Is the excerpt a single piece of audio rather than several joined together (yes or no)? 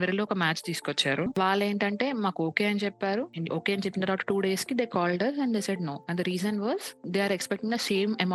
no